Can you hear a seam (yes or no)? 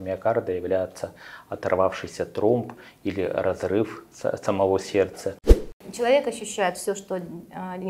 yes